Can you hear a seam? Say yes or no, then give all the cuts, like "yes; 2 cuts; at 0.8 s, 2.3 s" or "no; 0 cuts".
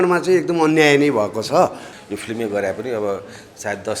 yes; 1 cut; at 1.9 s